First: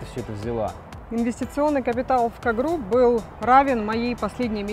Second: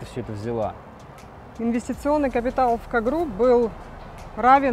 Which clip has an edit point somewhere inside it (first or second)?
first